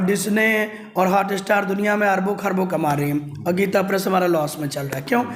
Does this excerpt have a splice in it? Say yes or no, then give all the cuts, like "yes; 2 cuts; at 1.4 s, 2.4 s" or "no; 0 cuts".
no; 0 cuts